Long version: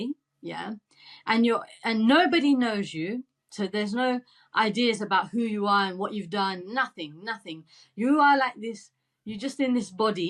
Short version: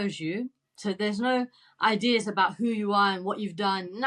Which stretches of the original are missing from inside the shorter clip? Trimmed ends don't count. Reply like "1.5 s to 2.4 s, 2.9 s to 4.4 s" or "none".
none